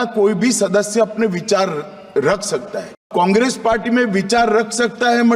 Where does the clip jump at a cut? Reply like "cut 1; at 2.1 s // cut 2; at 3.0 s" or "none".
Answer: cut 1; at 3.1 s